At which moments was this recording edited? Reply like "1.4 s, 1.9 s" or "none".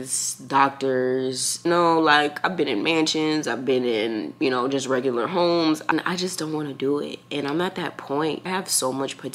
1.7 s, 5.8 s, 8.5 s